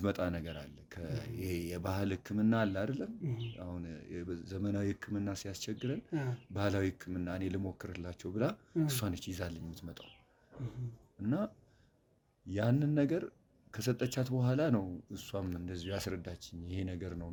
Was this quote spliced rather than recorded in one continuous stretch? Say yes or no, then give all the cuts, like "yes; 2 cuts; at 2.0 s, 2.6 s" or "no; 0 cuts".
no; 0 cuts